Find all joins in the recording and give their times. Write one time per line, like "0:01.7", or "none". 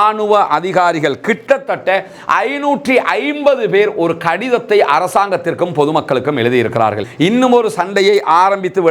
0:07.0